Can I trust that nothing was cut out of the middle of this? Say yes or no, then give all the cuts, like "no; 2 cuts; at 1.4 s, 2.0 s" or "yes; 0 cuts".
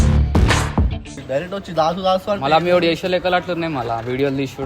no; 1 cut; at 1.2 s